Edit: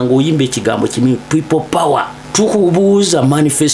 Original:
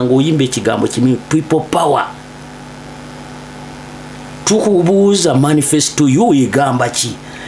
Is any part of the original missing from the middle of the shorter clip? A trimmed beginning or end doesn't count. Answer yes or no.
yes